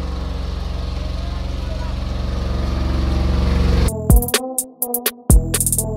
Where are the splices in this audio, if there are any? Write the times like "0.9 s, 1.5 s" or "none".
3.9 s